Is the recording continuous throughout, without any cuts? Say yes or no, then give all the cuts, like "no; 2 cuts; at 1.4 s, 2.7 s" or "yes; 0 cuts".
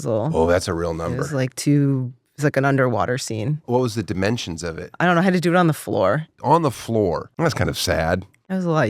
no; 1 cut; at 7.3 s